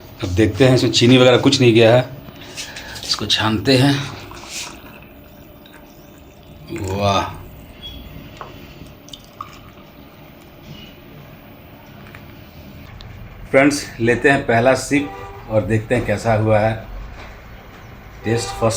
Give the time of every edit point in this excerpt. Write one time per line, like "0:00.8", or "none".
none